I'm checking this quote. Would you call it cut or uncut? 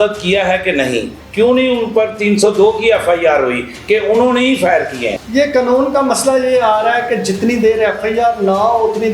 cut